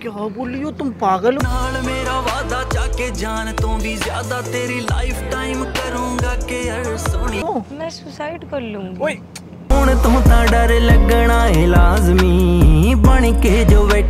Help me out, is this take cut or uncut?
uncut